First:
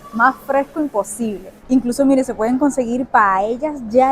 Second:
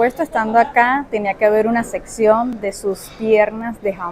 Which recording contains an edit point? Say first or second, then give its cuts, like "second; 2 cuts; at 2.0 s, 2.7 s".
first; 2 cuts; at 1.5 s, 3.0 s